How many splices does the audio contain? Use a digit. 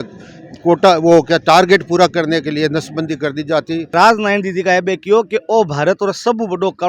1